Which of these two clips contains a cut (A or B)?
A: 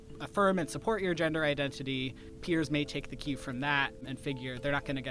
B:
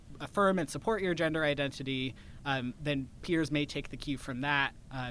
A